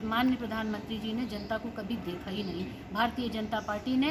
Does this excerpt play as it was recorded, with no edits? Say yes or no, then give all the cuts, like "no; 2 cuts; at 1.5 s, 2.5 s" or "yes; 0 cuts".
yes; 0 cuts